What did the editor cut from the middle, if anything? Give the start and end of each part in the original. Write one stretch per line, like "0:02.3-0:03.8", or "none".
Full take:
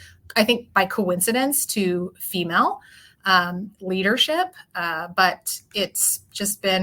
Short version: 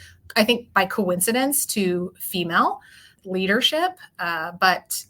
0:03.1-0:03.7